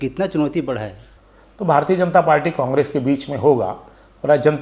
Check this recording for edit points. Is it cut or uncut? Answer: cut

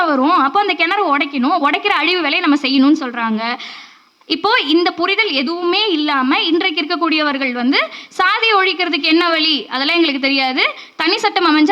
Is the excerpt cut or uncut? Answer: uncut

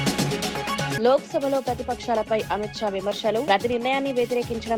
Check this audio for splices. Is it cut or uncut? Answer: cut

